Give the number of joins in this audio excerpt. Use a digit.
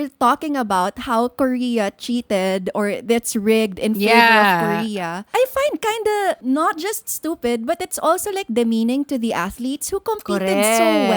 2